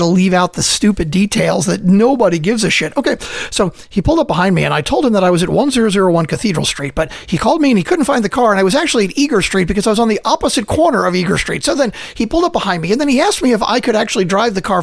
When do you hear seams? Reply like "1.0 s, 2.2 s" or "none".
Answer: none